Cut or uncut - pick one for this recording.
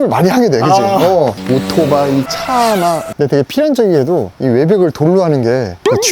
cut